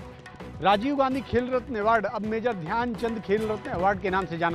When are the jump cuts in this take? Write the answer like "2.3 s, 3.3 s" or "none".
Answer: none